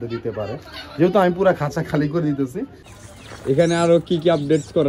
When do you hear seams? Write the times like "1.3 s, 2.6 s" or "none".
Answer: 2.8 s